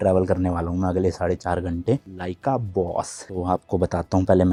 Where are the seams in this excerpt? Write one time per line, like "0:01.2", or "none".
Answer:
none